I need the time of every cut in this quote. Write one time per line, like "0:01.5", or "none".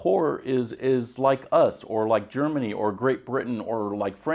none